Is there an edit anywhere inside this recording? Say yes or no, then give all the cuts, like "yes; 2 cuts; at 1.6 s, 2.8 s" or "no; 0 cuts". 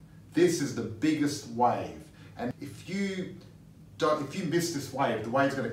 yes; 1 cut; at 2.5 s